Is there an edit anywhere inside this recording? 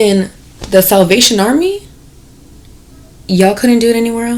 no; 0 cuts

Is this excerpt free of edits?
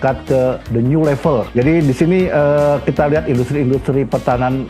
no; 1 cut; at 1.5 s

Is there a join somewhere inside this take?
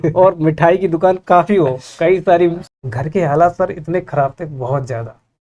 yes; 1 cut; at 2.7 s

